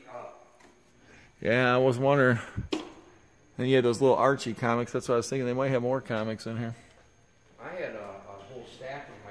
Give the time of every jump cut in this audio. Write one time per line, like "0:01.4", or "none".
none